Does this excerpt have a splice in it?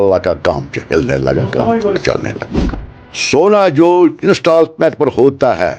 yes; 1 cut; at 2.6 s

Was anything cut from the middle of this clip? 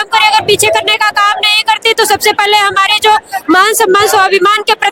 no; 0 cuts

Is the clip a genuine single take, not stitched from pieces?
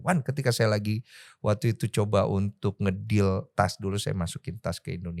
yes; 0 cuts

